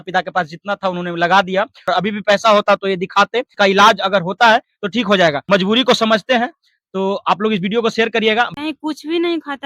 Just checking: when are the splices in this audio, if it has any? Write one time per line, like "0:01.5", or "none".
0:01.9
0:03.5
0:05.4
0:08.5